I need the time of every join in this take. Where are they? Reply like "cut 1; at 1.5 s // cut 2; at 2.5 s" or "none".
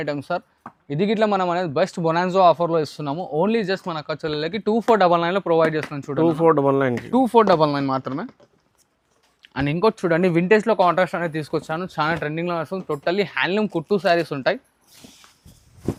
none